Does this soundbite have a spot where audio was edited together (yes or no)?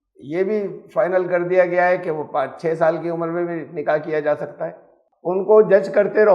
yes